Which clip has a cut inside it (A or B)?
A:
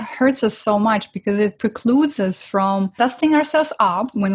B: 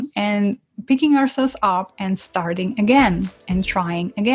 A